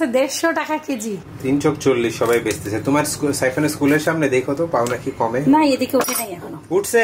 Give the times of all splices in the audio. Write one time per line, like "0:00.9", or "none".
0:01.3